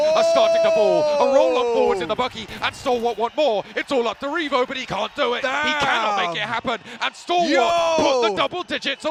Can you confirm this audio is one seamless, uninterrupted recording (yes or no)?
yes